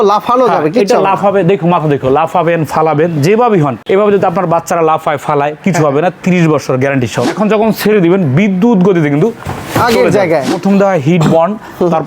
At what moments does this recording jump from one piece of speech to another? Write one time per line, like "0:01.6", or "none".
0:03.8
0:07.3
0:10.5